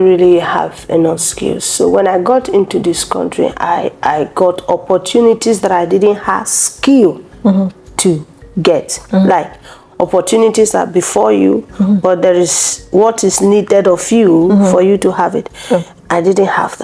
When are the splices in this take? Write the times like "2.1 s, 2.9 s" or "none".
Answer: none